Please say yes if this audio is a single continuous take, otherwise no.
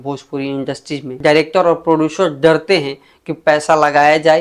no